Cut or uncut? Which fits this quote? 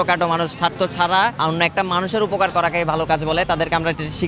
cut